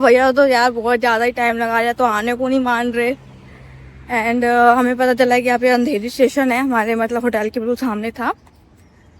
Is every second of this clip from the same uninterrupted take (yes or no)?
yes